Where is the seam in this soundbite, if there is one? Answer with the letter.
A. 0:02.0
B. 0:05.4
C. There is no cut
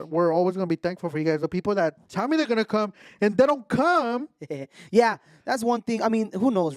C